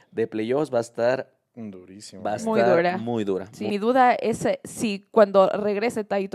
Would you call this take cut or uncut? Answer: cut